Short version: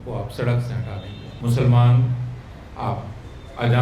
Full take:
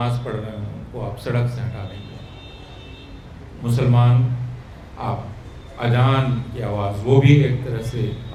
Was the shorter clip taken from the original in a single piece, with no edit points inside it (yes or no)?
no